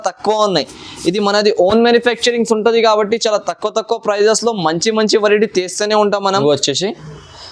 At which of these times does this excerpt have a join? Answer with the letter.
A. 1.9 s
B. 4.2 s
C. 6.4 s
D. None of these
C